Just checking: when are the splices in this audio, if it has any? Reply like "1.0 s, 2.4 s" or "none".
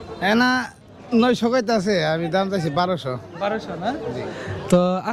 none